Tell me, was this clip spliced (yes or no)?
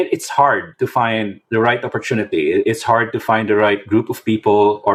no